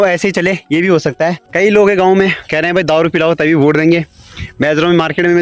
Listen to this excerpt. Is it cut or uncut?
cut